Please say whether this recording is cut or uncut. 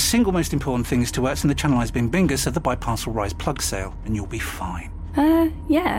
uncut